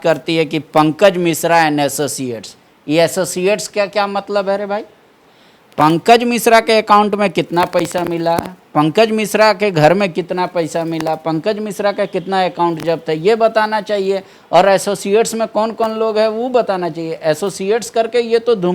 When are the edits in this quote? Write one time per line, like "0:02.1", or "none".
none